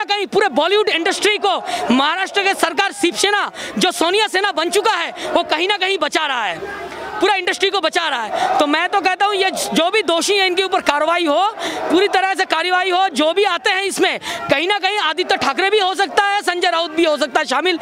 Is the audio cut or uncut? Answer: uncut